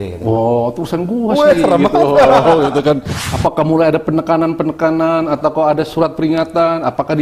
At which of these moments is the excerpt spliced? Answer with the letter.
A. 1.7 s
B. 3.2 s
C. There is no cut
B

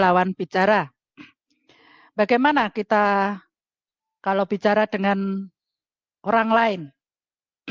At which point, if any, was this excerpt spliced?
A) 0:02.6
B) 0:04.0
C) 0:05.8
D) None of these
D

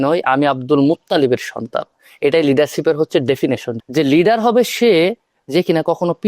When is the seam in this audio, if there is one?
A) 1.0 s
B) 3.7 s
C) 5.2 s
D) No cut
B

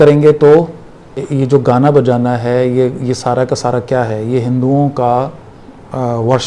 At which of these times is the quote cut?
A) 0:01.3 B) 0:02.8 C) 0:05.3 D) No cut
A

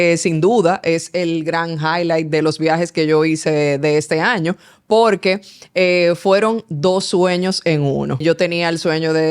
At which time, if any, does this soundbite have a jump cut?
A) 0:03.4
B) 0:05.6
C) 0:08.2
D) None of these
C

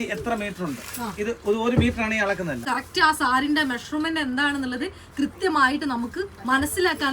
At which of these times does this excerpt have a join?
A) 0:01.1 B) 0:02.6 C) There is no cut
B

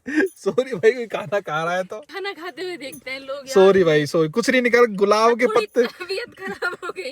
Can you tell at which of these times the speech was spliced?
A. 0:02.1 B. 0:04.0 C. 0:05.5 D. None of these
A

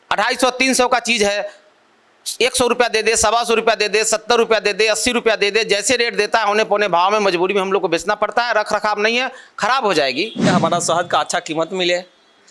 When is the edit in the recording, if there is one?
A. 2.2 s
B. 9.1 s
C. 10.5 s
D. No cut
C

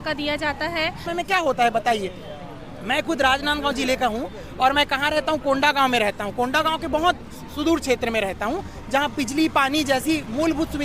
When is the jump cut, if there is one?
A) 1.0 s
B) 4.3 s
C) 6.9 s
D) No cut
A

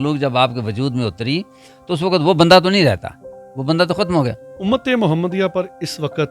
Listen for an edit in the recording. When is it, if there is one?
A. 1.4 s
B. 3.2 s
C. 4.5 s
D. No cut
C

